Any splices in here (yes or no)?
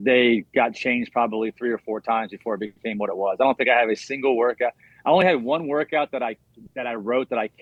no